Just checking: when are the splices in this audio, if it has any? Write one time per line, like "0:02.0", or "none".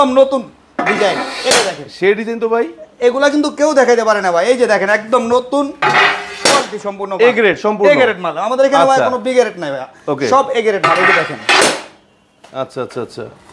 none